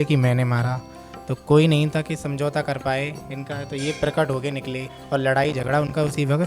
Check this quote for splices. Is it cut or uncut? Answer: cut